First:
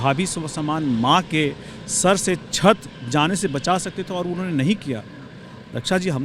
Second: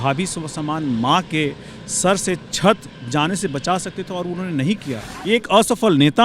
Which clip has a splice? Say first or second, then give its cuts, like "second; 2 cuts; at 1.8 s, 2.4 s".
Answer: second; 1 cut; at 5.1 s